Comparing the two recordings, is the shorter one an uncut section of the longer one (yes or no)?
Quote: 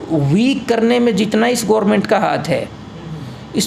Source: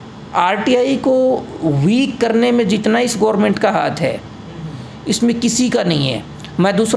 yes